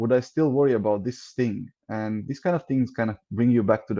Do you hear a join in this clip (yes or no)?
no